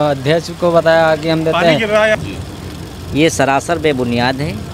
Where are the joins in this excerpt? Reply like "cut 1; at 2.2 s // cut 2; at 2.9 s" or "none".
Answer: cut 1; at 2.2 s